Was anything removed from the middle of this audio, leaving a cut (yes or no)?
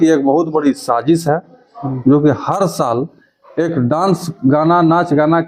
no